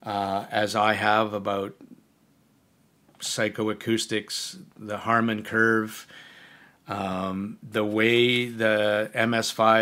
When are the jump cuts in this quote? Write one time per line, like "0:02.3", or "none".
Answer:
none